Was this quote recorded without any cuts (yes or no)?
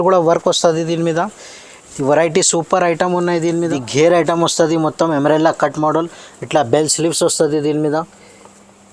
no